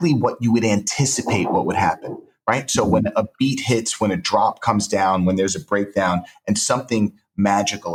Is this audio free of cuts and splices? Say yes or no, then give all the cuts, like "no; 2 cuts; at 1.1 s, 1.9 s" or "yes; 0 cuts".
yes; 0 cuts